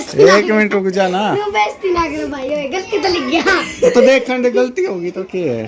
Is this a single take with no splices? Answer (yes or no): yes